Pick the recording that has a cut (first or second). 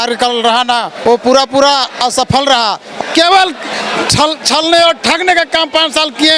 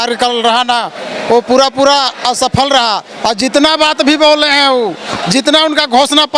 first